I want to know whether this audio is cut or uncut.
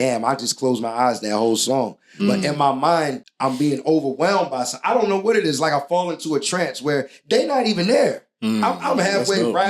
cut